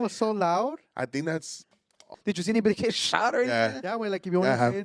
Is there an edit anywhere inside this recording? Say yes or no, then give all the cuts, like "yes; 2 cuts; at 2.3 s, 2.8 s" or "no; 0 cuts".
yes; 1 cut; at 2.1 s